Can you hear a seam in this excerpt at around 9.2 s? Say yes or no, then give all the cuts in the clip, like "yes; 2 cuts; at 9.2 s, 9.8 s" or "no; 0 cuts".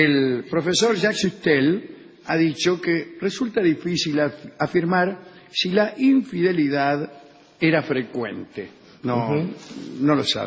yes; 1 cut; at 9.2 s